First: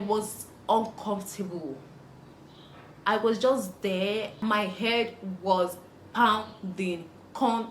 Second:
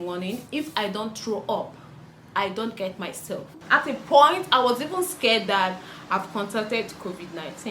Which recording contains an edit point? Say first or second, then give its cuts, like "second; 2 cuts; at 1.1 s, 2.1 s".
second; 1 cut; at 3.6 s